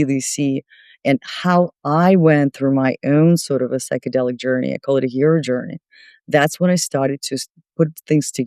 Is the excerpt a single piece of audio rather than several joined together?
yes; 0 cuts

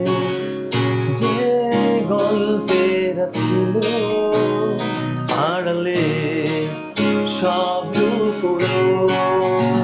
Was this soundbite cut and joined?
no; 0 cuts

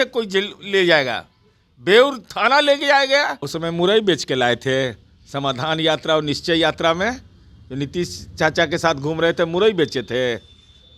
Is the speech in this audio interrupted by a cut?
yes; 1 cut; at 3.4 s

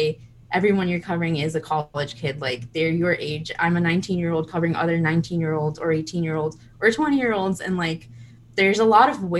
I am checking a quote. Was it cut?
no; 0 cuts

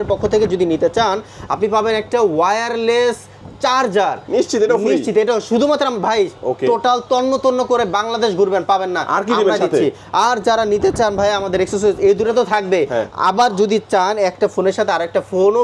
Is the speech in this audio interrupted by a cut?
no; 0 cuts

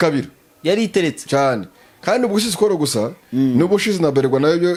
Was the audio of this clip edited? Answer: no; 0 cuts

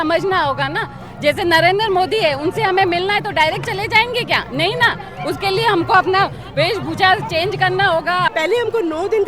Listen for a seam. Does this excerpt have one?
yes; 1 cut; at 8.3 s

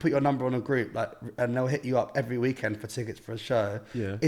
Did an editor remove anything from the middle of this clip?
no; 0 cuts

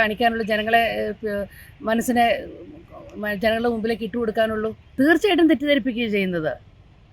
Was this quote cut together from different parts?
no; 0 cuts

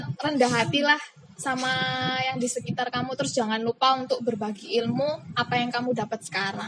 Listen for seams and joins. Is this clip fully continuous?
yes; 0 cuts

